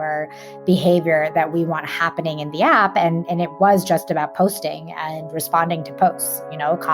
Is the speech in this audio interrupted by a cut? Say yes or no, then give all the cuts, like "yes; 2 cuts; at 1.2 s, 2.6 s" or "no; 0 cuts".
no; 0 cuts